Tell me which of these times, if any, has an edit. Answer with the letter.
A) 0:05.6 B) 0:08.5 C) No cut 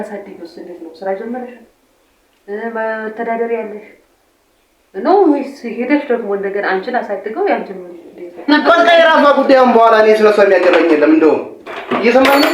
B